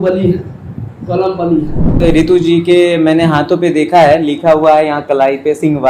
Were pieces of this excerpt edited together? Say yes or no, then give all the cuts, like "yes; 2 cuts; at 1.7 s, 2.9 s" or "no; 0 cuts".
yes; 1 cut; at 2.0 s